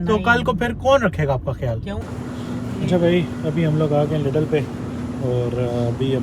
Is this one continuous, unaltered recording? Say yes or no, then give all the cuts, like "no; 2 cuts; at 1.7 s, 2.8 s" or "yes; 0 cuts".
no; 1 cut; at 2.0 s